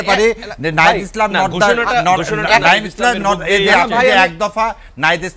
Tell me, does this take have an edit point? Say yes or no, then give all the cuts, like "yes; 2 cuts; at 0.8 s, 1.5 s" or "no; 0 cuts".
no; 0 cuts